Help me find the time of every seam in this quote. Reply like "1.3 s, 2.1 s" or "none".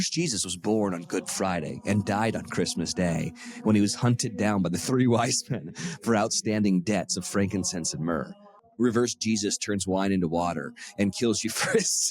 8.6 s